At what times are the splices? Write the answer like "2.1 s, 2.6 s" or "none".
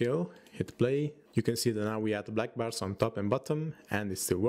1.2 s